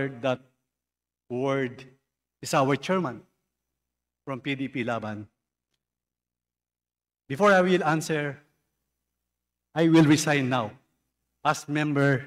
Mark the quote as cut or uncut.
uncut